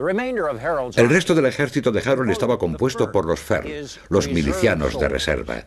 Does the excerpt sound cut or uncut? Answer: cut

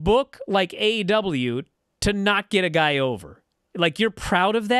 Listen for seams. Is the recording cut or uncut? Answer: uncut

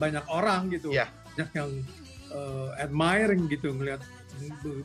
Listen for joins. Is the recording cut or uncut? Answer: cut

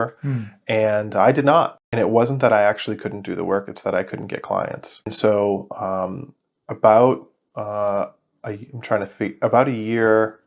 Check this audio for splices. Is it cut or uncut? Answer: cut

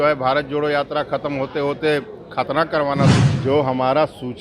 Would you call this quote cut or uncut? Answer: cut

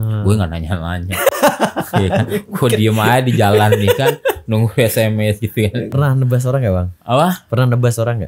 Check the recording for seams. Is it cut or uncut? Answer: cut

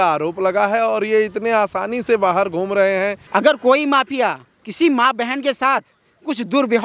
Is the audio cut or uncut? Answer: cut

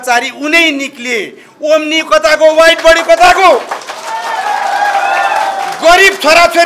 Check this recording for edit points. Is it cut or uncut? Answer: uncut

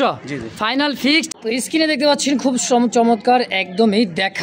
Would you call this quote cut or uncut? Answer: cut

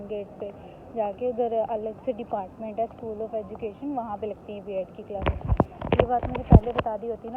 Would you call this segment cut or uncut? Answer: uncut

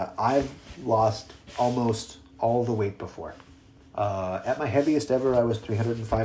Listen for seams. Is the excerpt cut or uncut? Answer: uncut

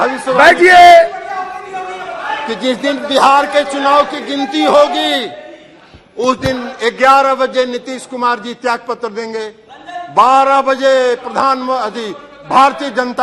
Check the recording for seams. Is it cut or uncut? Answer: uncut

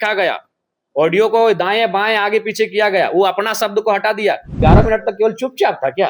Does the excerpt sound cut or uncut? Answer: cut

